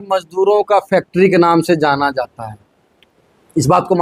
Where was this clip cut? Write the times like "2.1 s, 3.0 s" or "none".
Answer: none